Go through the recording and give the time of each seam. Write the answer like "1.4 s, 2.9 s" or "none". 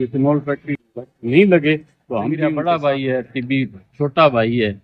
2.4 s